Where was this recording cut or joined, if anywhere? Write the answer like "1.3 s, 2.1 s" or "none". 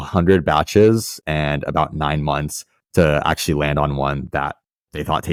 none